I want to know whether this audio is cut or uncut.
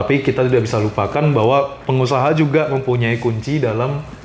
uncut